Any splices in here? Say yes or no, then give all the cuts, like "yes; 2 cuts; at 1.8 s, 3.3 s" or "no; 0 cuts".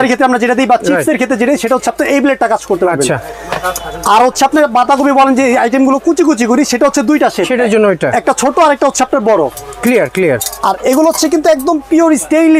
no; 0 cuts